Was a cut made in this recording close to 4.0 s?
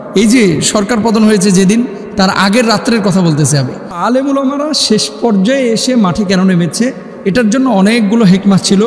yes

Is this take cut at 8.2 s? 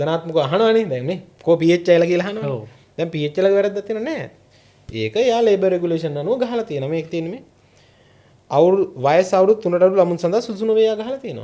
no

